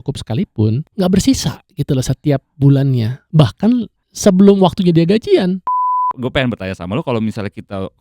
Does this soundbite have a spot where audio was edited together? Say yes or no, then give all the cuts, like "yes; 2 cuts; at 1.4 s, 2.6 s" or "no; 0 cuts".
yes; 3 cuts; at 0.9 s, 4.0 s, 6.1 s